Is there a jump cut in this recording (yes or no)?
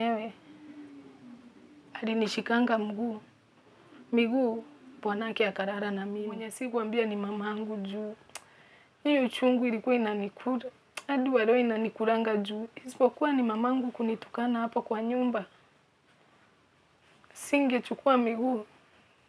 yes